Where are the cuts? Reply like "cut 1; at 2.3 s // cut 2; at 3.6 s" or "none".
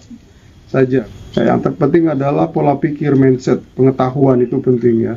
cut 1; at 1.1 s